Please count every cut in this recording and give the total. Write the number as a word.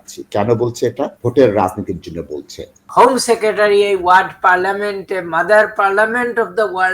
two